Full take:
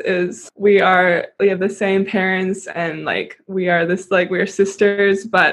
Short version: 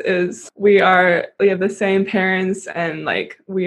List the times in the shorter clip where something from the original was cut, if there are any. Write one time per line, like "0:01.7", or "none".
none